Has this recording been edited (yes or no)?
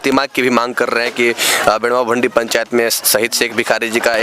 no